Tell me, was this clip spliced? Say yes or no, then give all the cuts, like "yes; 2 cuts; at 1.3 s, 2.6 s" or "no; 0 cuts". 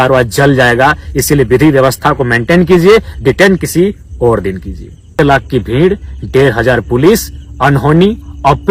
yes; 1 cut; at 5.2 s